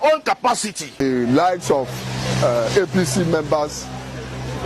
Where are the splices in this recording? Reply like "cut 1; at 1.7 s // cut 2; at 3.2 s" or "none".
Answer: cut 1; at 1.0 s